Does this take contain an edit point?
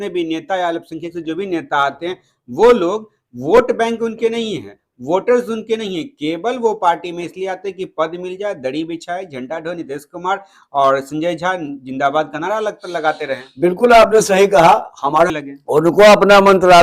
yes; 1 cut; at 15.3 s

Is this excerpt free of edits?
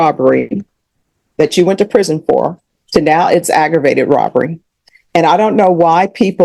yes; 0 cuts

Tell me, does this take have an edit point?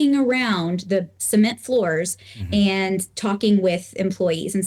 no; 0 cuts

